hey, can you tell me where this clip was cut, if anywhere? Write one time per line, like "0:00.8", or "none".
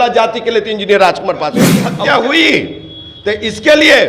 0:01.8